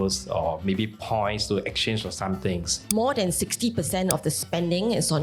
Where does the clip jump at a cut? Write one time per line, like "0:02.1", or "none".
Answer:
0:02.7